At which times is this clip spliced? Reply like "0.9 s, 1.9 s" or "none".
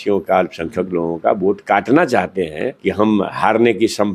2.7 s